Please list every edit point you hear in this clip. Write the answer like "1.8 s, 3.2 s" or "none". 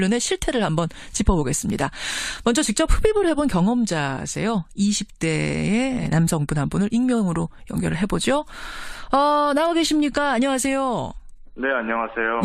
none